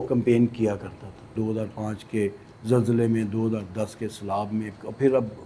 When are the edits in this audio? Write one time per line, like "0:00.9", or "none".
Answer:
0:01.3